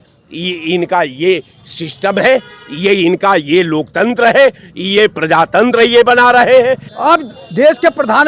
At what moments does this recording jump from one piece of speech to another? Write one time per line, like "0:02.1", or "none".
none